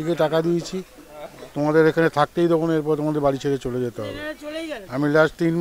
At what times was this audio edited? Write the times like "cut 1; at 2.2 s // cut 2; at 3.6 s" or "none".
none